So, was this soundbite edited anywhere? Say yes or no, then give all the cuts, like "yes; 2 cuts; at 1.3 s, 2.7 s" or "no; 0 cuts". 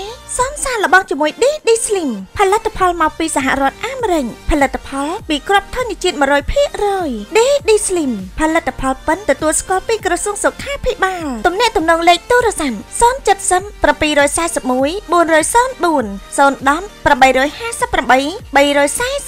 no; 0 cuts